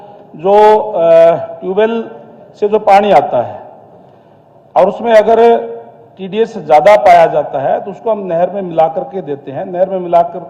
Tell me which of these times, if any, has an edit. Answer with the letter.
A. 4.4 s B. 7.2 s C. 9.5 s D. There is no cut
D